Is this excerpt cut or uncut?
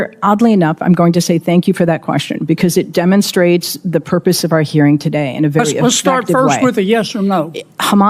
uncut